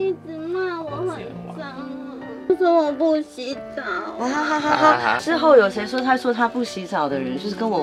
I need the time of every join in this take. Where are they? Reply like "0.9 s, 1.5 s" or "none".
2.5 s